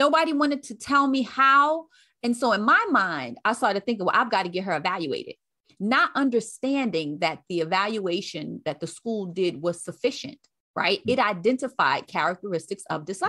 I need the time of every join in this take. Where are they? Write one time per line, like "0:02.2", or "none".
none